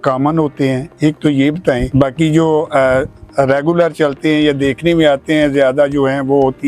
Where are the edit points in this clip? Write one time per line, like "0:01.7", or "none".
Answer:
none